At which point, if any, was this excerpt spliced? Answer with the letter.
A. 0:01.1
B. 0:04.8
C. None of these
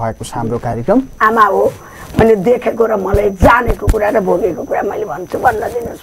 A